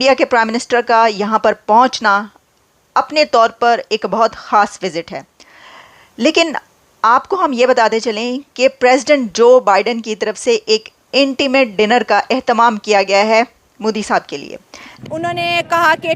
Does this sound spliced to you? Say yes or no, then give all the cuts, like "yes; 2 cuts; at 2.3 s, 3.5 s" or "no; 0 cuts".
yes; 1 cut; at 14.9 s